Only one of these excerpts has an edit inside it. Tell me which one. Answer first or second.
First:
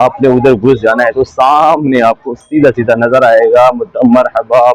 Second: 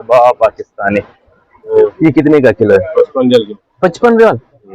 second